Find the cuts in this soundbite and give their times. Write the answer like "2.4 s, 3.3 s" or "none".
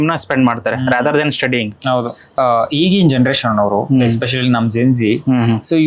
2.3 s

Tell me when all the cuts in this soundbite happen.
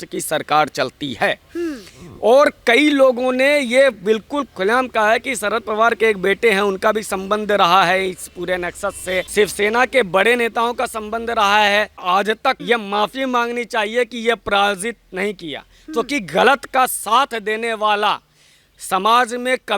9.3 s, 12.0 s

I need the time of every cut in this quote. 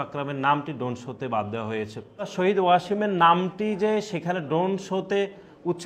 2.3 s

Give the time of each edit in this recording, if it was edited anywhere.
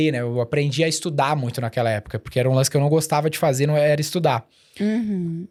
none

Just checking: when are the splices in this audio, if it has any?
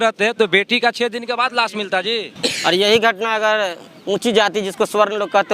2.3 s

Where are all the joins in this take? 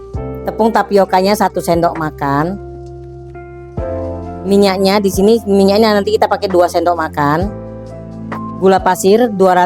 2.6 s, 4.4 s

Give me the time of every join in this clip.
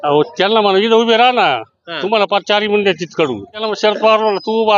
3.6 s

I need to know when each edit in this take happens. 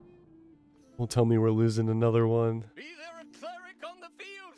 none

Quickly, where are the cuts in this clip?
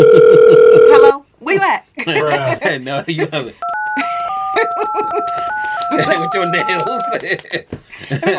1.0 s

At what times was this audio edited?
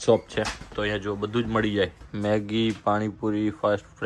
none

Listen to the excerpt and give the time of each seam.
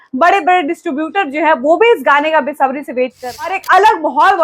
3.5 s

